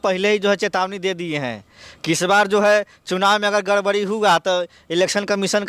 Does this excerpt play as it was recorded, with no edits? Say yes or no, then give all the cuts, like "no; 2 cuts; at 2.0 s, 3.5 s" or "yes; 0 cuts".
yes; 0 cuts